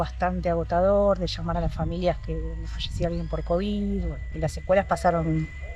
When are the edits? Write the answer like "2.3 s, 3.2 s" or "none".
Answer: 4.2 s